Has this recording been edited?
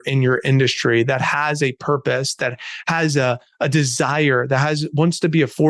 no; 0 cuts

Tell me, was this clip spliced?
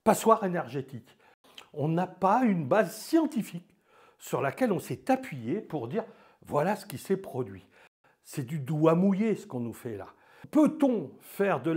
yes; 3 cuts; at 1.4 s, 7.9 s, 10.4 s

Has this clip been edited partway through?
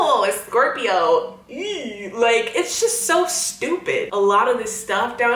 yes; 1 cut; at 4.1 s

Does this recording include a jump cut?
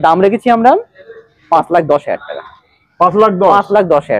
no; 0 cuts

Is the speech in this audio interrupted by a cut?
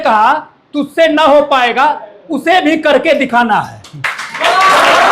no; 0 cuts

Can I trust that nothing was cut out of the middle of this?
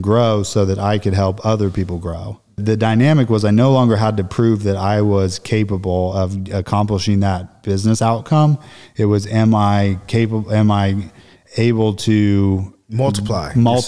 no; 1 cut; at 2.6 s

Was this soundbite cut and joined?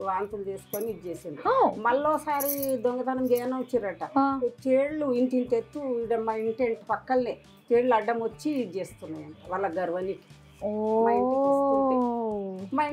no; 0 cuts

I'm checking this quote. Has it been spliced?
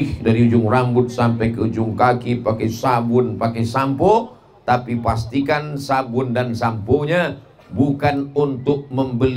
no; 0 cuts

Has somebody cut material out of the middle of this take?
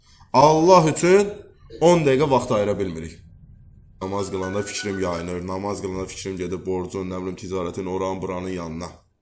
yes; 1 cut; at 4.0 s

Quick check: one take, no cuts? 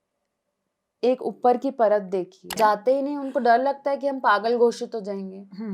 no; 1 cut; at 2.5 s

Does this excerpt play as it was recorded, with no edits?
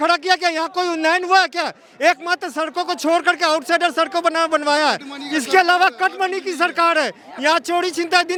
yes; 0 cuts

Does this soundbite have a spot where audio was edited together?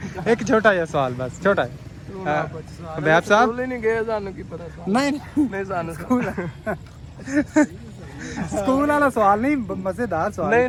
no; 0 cuts

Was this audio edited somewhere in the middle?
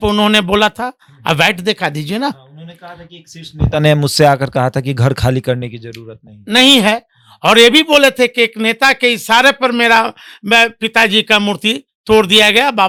no; 0 cuts

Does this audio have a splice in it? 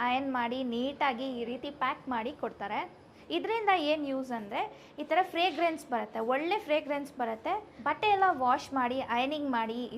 yes; 2 cuts; at 3.1 s, 7.7 s

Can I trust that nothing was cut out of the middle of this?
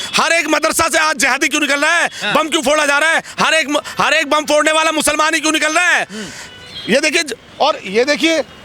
yes; 0 cuts

